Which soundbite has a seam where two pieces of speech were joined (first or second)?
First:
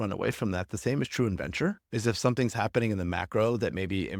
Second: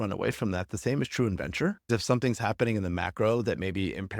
second